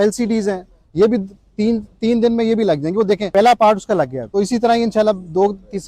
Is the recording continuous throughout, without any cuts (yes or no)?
no